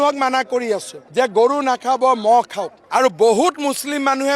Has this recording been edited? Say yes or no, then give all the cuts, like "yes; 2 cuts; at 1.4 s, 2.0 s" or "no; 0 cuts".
no; 0 cuts